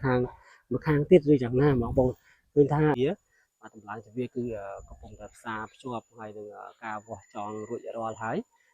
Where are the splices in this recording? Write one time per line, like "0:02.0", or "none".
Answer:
0:03.0